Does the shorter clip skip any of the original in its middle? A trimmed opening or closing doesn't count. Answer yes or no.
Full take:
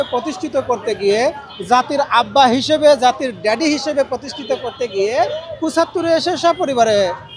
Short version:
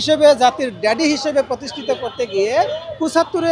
no